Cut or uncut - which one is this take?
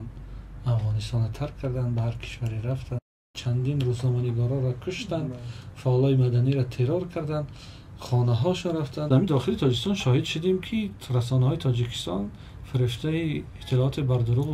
cut